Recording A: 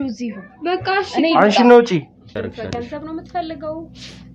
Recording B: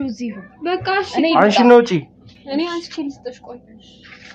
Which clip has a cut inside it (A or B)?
A